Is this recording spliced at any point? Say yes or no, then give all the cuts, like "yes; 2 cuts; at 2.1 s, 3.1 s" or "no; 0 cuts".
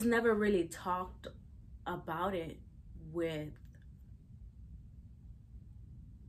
no; 0 cuts